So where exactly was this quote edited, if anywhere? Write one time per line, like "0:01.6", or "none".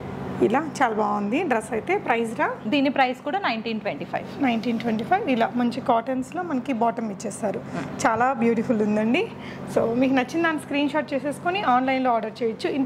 none